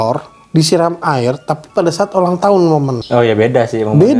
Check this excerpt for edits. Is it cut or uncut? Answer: cut